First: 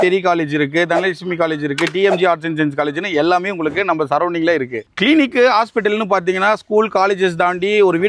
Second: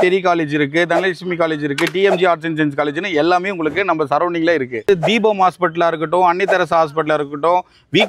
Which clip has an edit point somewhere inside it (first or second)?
second